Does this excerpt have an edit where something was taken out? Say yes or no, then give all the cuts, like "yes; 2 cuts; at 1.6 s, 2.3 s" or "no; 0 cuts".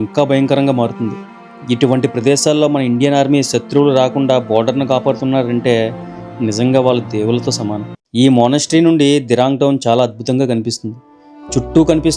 yes; 1 cut; at 7.9 s